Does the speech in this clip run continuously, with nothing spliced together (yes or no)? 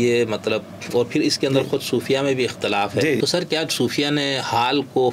no